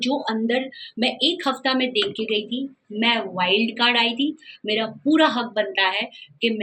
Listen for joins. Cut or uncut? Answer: uncut